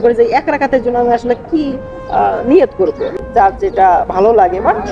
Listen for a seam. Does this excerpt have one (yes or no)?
yes